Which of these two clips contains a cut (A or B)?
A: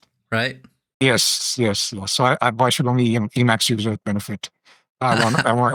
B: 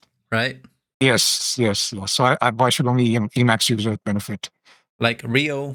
B